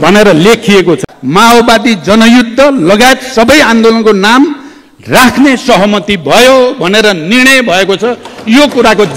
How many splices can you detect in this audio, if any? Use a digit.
1